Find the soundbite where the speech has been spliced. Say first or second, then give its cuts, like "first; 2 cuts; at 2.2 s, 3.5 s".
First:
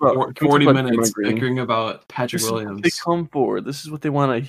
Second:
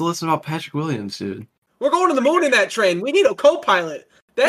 second; 1 cut; at 1.6 s